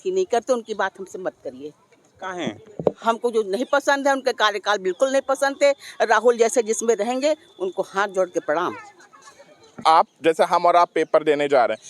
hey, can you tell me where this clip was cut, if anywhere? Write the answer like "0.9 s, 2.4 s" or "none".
9.8 s